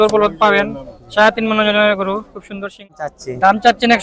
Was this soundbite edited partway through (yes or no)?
yes